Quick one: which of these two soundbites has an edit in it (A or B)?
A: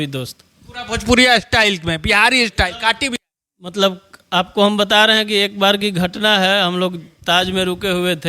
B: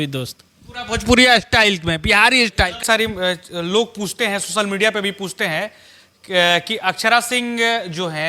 B